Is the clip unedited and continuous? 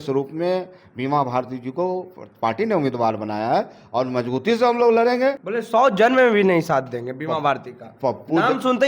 no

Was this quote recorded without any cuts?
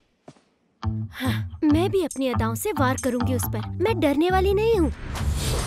yes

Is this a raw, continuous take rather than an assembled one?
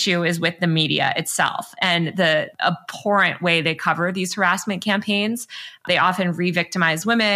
no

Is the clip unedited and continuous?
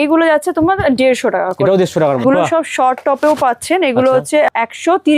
no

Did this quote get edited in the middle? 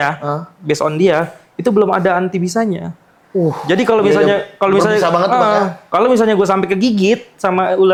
no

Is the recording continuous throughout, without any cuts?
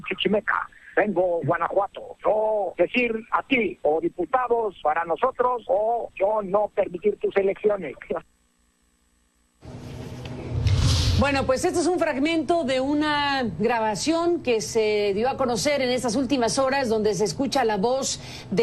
no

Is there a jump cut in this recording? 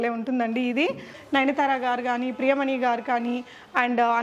yes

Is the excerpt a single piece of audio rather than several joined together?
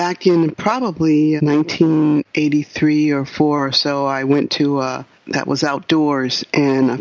no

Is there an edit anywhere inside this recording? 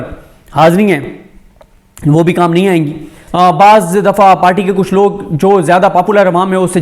yes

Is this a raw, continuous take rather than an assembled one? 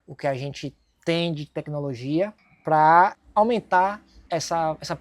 no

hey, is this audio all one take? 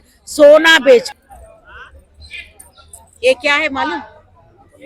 no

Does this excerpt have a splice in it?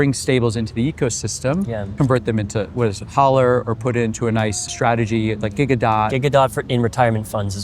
yes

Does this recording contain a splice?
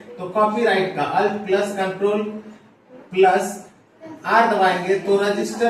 no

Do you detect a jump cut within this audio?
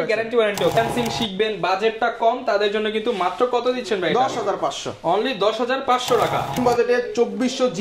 yes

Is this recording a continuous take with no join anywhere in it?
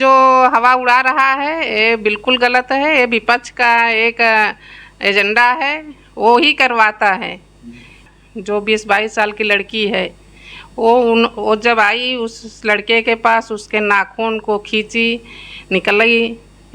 no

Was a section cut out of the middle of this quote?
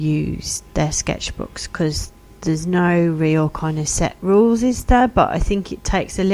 no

